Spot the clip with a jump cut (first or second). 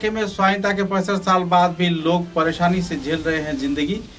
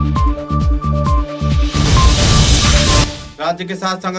second